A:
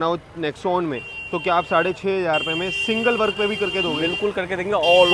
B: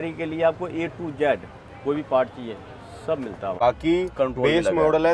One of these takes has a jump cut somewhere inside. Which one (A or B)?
B